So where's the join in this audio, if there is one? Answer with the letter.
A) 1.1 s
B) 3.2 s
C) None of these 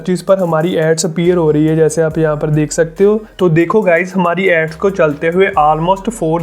B